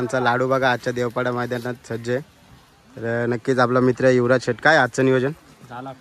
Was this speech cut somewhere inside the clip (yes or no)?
no